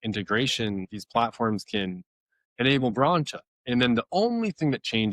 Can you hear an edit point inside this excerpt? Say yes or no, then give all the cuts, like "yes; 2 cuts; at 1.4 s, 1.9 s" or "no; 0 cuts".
yes; 1 cut; at 0.9 s